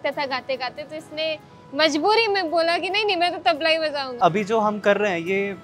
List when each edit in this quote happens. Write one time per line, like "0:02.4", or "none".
0:04.2